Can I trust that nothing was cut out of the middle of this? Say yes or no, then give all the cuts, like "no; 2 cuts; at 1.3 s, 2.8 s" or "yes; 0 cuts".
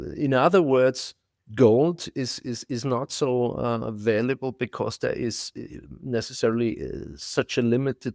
yes; 0 cuts